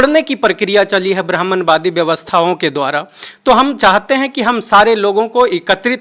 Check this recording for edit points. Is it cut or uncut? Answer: uncut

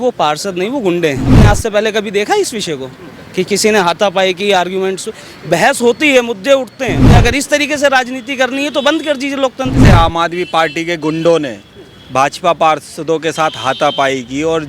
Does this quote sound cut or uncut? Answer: cut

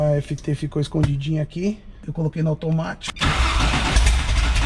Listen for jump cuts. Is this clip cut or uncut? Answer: cut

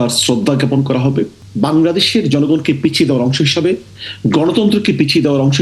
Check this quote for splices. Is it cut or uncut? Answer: cut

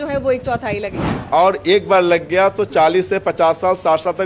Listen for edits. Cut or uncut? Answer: cut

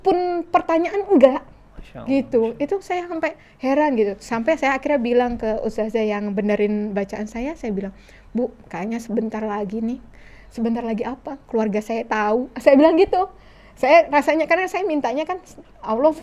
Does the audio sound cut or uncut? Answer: uncut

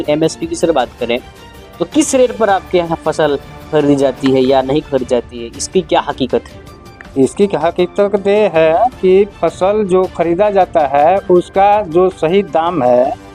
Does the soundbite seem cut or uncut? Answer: uncut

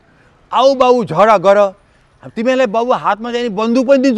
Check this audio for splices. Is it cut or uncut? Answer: uncut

